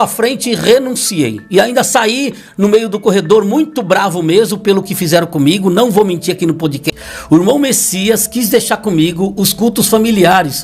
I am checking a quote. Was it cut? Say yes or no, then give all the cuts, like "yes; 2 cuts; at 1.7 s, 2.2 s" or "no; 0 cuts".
yes; 1 cut; at 6.8 s